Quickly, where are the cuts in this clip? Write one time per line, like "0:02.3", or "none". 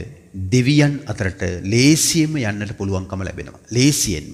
none